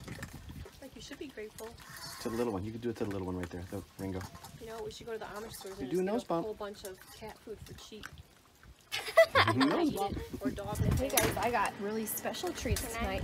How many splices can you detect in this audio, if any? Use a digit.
1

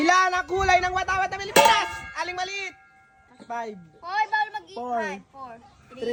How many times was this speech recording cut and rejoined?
0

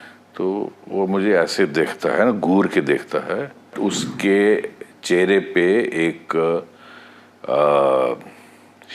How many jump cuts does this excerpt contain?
1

